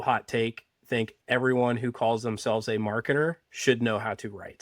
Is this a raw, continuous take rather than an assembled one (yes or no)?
no